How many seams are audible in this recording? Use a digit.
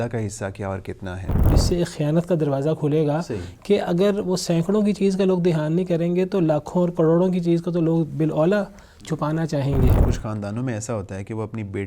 2